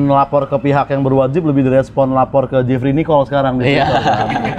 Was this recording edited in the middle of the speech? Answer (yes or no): no